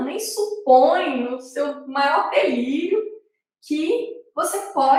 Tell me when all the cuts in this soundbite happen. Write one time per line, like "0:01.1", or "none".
none